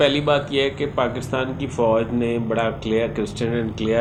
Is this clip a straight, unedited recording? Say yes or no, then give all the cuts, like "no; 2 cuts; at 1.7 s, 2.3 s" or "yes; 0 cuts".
yes; 0 cuts